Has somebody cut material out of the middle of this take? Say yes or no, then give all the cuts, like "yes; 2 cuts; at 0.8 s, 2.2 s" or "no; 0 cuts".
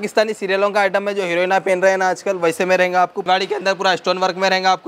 yes; 1 cut; at 3.2 s